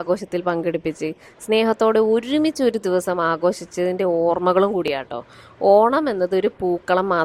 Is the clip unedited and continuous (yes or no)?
yes